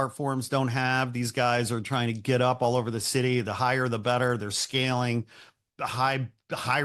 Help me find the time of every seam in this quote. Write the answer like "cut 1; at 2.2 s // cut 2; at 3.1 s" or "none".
none